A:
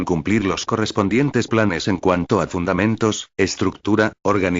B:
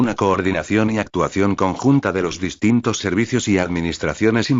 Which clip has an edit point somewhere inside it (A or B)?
A